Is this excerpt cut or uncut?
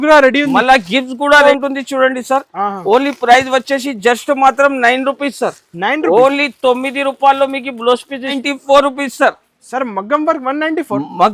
cut